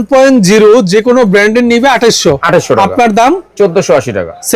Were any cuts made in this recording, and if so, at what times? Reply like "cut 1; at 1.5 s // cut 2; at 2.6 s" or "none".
none